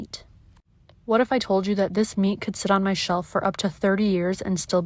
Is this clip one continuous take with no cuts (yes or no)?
yes